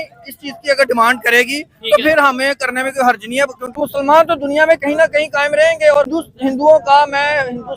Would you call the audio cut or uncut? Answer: cut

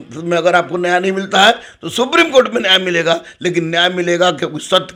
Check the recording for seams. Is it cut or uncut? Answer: uncut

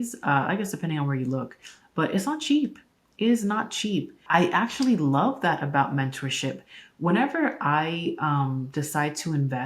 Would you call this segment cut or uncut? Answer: cut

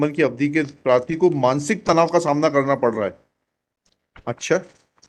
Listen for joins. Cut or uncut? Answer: uncut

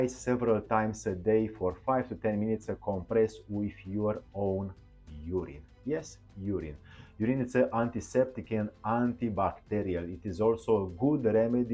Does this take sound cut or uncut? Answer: uncut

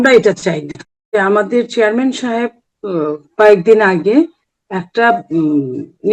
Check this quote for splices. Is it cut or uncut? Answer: cut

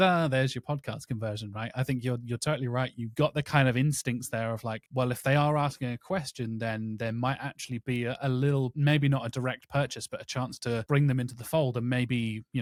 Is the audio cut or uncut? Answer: uncut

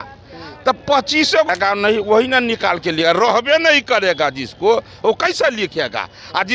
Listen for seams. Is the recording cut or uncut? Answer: cut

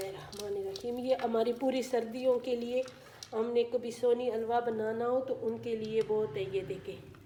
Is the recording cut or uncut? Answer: uncut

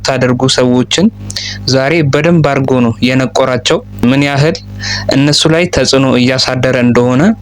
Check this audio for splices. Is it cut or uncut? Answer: uncut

